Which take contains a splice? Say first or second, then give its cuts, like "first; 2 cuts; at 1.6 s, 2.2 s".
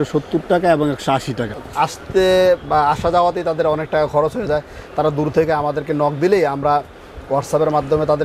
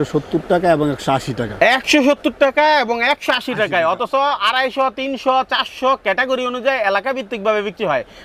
first; 1 cut; at 1.5 s